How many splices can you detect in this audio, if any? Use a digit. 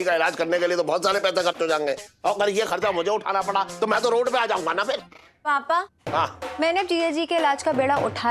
2